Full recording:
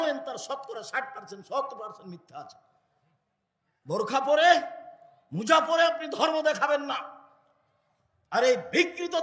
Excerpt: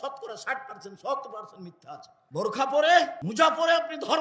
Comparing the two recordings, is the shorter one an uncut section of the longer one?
no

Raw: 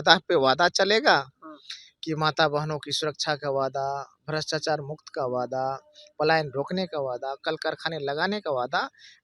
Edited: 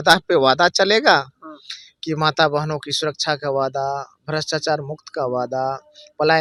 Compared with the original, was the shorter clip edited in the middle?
no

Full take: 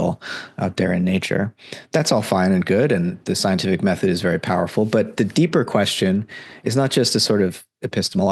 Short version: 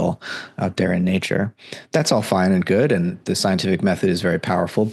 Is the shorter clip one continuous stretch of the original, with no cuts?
yes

